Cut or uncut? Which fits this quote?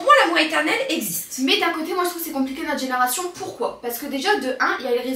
uncut